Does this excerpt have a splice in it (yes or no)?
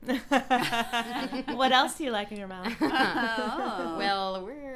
yes